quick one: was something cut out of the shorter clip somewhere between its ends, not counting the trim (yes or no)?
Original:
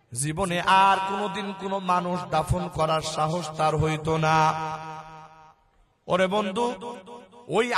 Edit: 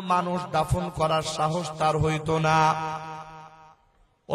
no